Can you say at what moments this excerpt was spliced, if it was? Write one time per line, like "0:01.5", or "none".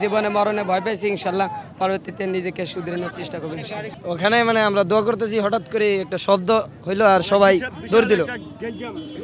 none